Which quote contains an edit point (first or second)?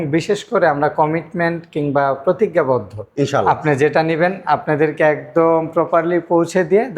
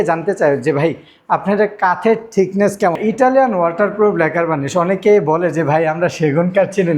second